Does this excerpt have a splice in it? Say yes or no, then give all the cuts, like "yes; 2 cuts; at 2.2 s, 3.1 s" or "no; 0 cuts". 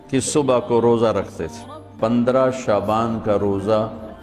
yes; 1 cut; at 2.1 s